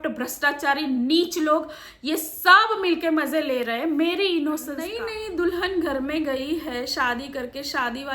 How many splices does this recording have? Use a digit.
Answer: 1